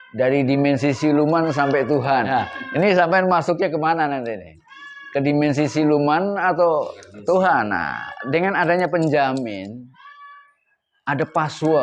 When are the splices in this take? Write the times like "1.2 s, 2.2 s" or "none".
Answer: 2.3 s, 8.2 s